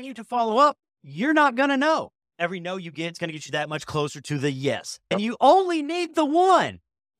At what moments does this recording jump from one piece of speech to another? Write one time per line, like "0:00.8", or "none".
0:02.2
0:05.1